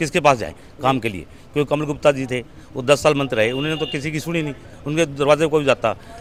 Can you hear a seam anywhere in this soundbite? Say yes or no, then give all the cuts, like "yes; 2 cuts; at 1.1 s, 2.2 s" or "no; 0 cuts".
no; 0 cuts